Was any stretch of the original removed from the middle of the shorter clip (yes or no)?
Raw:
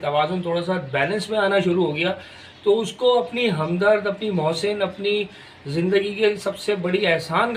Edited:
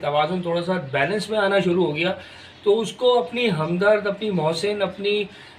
no